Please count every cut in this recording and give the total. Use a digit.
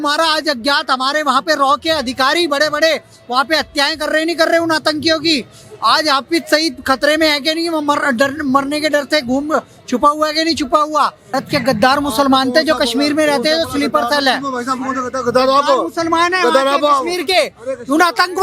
1